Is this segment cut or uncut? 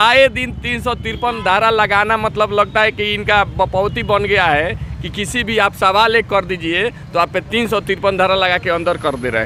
uncut